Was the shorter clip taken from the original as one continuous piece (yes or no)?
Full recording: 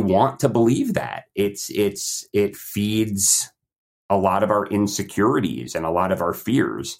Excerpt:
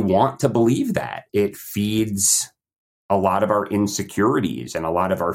no